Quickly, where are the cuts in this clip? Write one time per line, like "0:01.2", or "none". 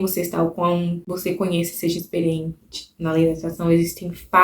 0:01.1